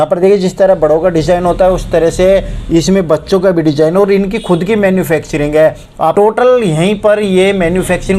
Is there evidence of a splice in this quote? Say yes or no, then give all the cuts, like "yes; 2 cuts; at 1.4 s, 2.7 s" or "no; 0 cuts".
yes; 1 cut; at 6.1 s